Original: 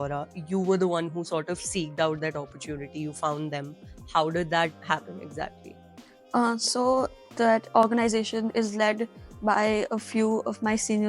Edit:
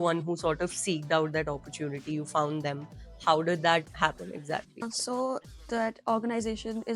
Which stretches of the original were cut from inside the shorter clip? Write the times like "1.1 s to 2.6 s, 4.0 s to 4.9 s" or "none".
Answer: 5.8 s to 6.6 s